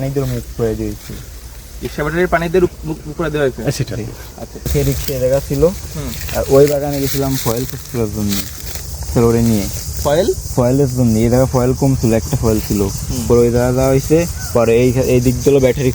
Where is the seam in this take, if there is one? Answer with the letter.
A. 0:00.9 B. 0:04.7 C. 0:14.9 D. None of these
B